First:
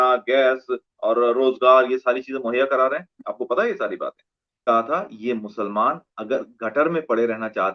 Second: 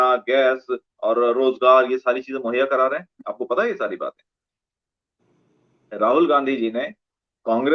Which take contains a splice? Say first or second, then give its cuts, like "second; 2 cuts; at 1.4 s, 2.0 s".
first; 1 cut; at 4.6 s